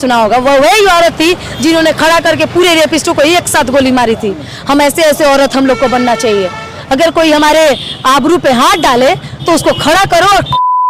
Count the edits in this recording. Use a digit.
0